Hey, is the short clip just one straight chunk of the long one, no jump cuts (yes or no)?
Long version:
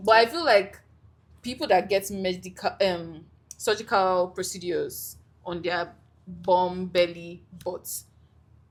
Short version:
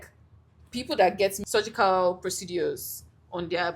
no